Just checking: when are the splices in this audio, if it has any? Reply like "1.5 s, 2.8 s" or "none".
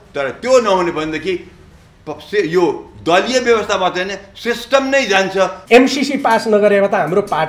5.6 s

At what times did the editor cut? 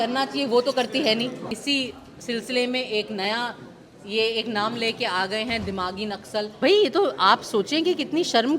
1.5 s, 6.5 s

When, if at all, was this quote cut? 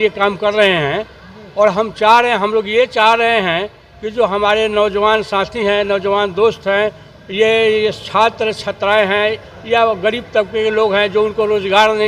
none

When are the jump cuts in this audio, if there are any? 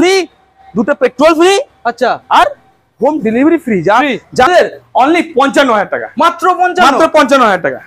4.5 s

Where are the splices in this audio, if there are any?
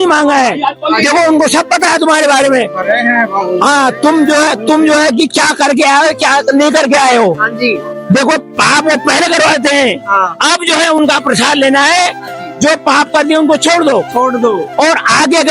none

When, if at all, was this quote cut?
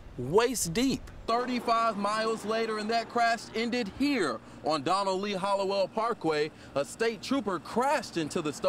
1.1 s

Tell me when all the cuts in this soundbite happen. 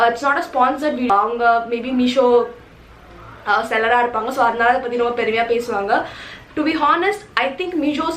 1.1 s

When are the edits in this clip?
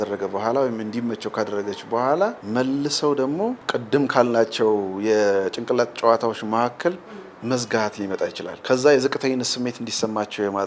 2.4 s, 3.6 s, 8.5 s

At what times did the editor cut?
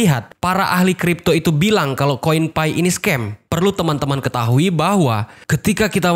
3.5 s

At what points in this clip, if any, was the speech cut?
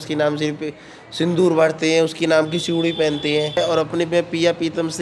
3.6 s

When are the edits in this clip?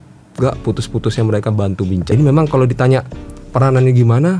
2.1 s

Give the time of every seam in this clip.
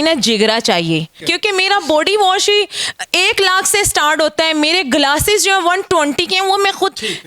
1.2 s

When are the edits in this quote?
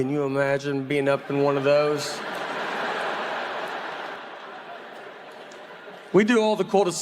4.2 s

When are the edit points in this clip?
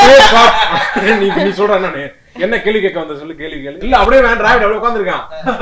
3.8 s

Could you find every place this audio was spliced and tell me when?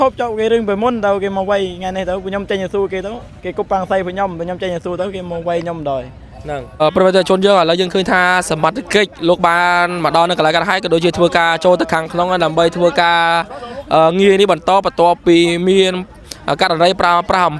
6.8 s

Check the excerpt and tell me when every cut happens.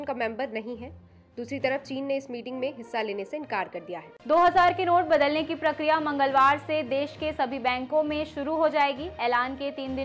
4.1 s

